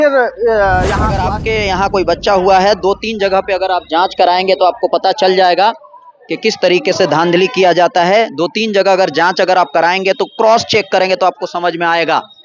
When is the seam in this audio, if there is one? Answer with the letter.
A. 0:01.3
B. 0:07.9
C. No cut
A